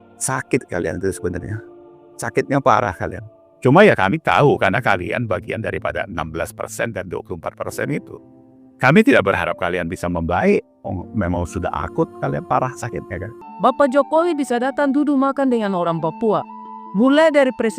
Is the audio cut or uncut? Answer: cut